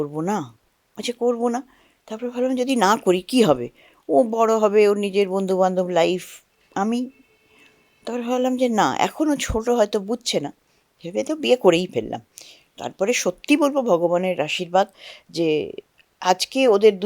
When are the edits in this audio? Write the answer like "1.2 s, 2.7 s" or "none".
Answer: none